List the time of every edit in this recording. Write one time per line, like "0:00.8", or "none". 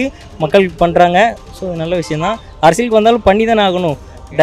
none